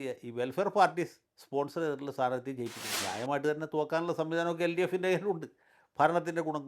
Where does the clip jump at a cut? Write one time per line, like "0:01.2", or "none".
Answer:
0:02.9